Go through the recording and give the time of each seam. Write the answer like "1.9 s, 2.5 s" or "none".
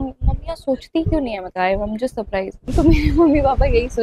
2.6 s